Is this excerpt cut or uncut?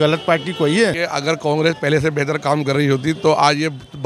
cut